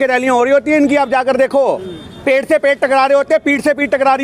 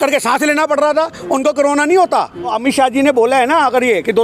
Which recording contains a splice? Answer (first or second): second